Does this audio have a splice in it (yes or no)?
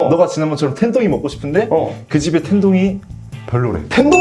no